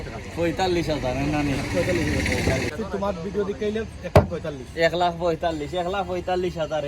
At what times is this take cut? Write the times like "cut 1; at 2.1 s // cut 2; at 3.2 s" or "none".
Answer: cut 1; at 2.7 s